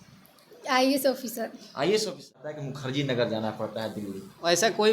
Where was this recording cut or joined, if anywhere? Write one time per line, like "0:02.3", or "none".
0:02.7